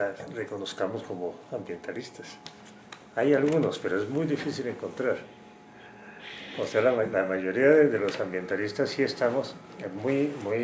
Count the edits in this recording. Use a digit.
0